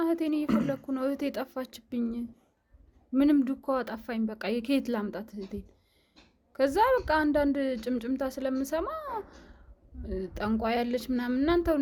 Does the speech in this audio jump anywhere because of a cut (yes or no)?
no